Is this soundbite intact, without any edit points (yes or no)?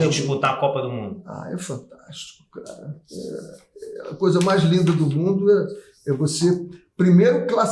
yes